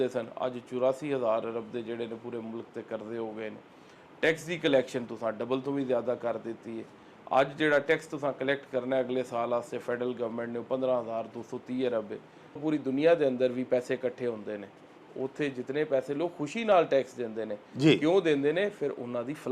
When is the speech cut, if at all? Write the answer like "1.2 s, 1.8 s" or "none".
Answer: 12.6 s